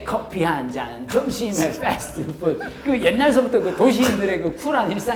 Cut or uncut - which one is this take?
uncut